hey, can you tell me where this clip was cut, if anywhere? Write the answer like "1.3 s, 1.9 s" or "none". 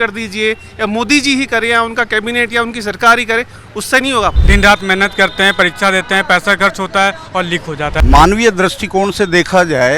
4.4 s, 8.0 s

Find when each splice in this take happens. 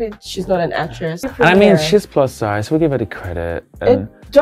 1.3 s

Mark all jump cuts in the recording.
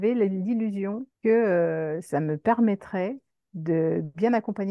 1.1 s, 2.0 s

